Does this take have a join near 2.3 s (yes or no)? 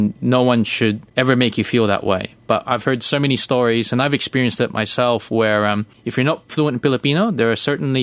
no